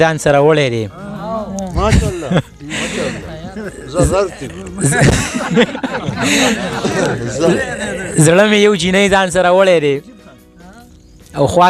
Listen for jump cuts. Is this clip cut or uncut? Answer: uncut